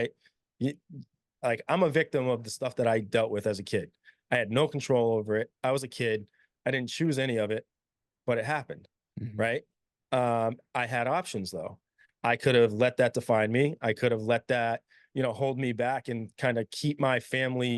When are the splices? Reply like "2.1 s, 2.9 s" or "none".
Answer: none